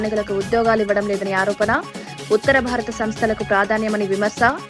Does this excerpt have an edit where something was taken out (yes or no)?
no